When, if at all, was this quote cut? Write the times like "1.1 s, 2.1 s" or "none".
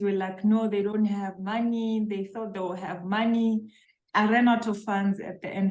3.8 s